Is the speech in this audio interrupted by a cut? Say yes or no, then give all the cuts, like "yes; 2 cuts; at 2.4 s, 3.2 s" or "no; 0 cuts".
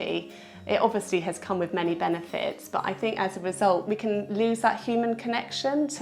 yes; 1 cut; at 3.8 s